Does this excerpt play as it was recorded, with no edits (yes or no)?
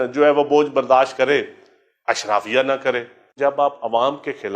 no